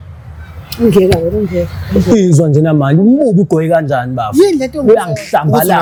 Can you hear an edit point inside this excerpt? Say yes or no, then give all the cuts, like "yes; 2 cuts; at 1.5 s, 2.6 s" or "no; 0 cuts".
no; 0 cuts